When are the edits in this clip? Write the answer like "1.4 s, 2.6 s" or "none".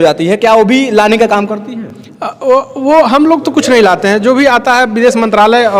none